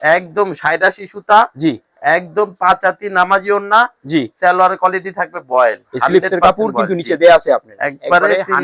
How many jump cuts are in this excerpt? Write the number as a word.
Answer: zero